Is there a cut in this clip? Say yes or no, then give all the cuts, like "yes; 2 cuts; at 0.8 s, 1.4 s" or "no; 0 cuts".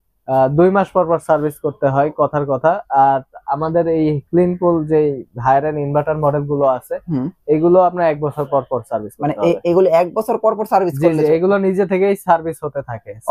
no; 0 cuts